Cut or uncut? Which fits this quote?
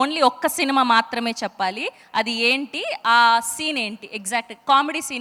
uncut